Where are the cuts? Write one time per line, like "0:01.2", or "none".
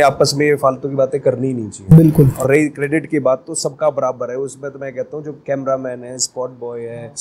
none